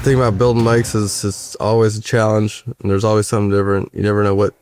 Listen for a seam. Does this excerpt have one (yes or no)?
no